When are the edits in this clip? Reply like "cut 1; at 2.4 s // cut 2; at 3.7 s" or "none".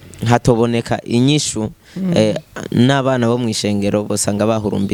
none